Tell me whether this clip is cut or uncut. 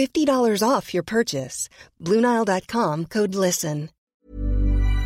cut